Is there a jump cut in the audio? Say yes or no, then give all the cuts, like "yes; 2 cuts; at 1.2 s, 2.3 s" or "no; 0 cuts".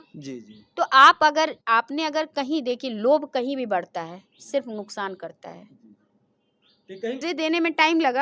yes; 1 cut; at 7.2 s